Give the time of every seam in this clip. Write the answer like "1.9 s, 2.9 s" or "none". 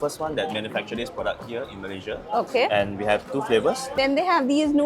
4.0 s